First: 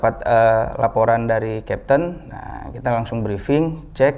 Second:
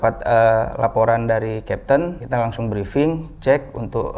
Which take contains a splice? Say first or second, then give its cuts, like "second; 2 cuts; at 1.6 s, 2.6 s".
second; 1 cut; at 2.2 s